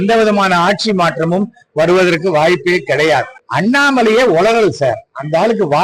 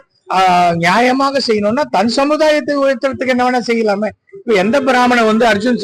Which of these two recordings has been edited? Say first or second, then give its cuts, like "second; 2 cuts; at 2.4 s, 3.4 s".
first; 1 cut; at 3.4 s